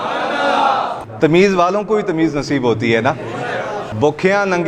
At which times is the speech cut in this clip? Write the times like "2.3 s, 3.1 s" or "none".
1.1 s, 3.9 s